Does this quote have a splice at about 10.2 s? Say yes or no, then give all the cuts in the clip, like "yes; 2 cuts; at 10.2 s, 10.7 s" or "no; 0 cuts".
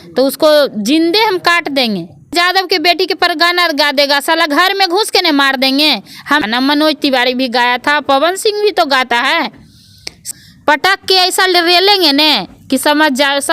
yes; 3 cuts; at 2.3 s, 6.4 s, 10.2 s